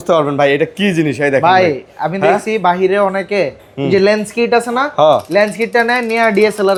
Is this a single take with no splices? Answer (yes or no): yes